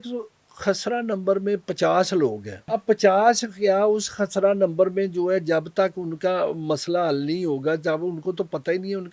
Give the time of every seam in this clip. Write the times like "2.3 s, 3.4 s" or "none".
2.6 s